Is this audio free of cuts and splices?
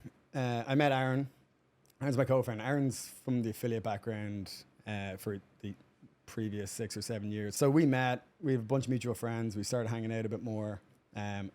no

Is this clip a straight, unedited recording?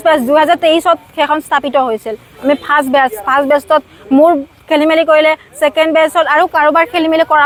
yes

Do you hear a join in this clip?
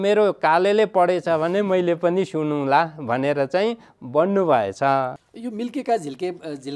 yes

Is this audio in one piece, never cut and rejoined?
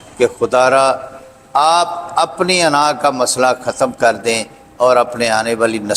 yes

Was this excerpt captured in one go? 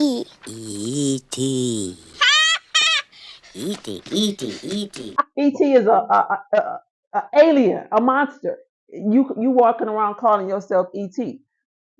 yes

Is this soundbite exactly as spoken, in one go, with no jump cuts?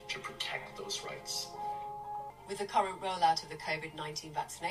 no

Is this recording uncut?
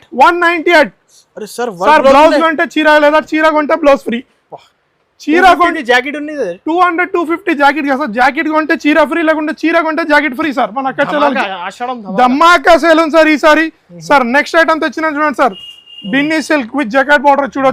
yes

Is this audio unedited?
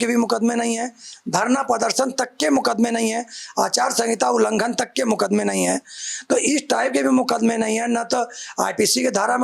yes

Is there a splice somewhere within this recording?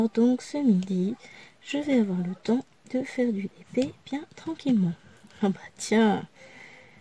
yes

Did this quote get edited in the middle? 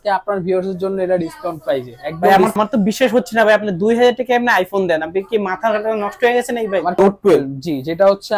yes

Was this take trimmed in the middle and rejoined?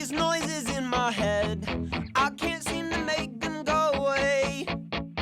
no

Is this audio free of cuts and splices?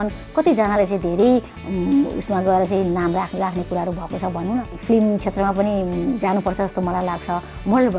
no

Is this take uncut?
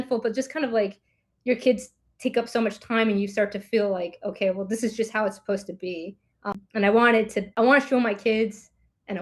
no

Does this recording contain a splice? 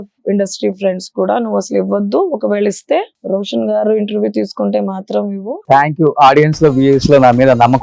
yes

